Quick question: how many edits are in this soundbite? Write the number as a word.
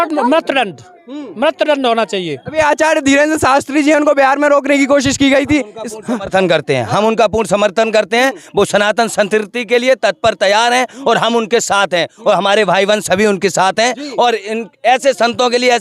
zero